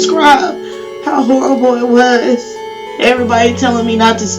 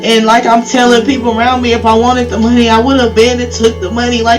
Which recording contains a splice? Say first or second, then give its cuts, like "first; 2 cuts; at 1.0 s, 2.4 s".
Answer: first; 1 cut; at 2.9 s